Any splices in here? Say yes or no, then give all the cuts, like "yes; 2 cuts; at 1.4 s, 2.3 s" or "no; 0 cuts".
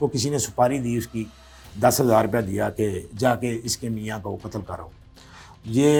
no; 0 cuts